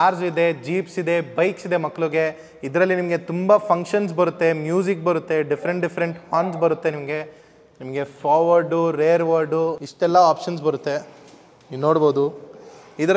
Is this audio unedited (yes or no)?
yes